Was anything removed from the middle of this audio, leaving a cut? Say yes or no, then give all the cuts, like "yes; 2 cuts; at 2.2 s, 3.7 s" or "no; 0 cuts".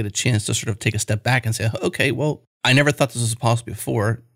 yes; 1 cut; at 2.5 s